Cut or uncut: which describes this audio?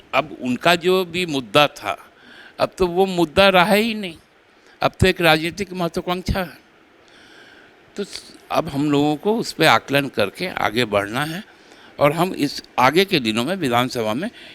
uncut